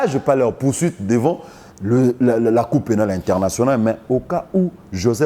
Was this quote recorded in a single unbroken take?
yes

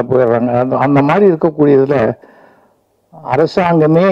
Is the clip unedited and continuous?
yes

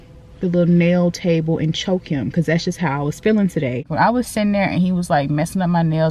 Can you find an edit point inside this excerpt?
yes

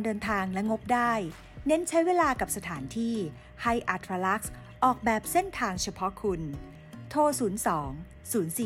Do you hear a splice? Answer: no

